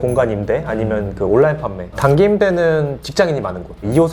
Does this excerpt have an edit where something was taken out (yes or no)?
yes